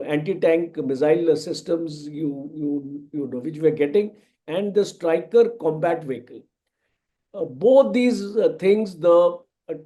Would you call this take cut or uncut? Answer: uncut